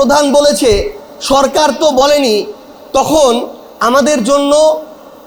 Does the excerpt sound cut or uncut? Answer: uncut